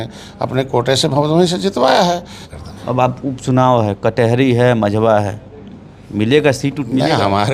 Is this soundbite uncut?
no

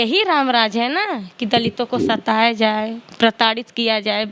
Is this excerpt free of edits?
yes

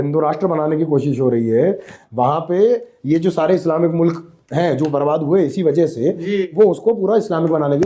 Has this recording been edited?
no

